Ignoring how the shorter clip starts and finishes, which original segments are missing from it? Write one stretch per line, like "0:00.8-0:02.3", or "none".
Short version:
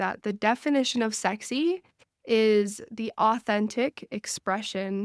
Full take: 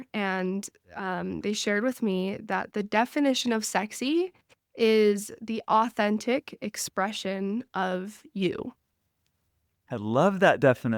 none